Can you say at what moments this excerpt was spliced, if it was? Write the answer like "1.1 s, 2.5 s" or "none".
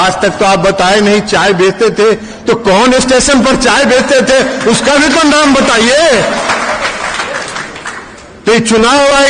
none